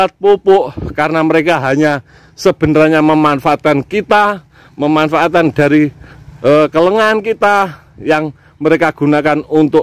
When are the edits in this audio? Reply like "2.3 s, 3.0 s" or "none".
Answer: none